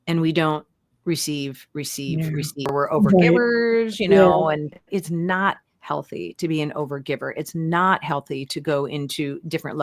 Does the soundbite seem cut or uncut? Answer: cut